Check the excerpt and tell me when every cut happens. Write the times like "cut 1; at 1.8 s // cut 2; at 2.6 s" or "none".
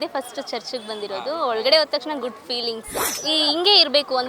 cut 1; at 3.1 s